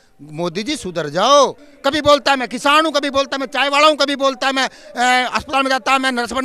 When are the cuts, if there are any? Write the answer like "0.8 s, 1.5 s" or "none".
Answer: 1.7 s